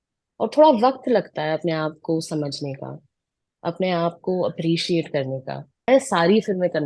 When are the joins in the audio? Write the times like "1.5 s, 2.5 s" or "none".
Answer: 5.9 s